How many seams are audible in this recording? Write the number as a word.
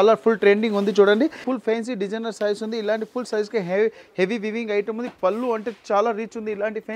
one